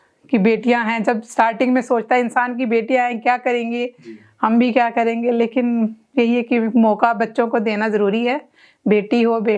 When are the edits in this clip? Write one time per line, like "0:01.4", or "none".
none